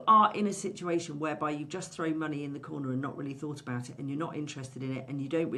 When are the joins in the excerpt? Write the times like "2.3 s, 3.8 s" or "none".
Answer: none